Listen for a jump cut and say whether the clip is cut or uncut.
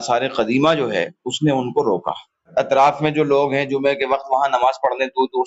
cut